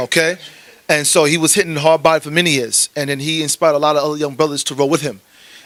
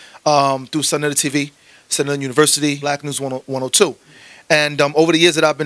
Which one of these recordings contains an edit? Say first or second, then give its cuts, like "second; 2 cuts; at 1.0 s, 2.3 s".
second; 1 cut; at 2.8 s